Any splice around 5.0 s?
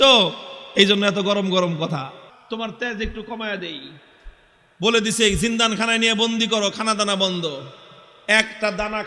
no; 1 cut; at 2.3 s

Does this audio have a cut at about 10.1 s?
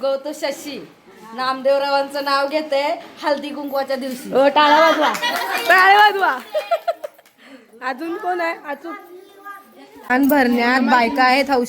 yes; 1 cut; at 10.1 s

